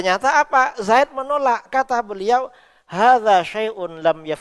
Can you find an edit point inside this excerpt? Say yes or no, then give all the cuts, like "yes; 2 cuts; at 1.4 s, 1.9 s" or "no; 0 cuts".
no; 0 cuts